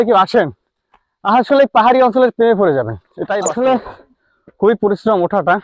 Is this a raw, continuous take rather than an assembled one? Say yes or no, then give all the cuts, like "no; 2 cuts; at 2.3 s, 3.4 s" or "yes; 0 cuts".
no; 1 cut; at 3.1 s